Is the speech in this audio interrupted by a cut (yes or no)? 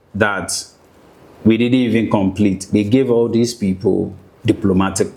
no